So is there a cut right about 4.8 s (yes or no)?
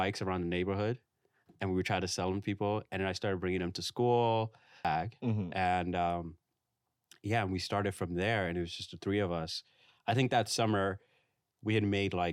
yes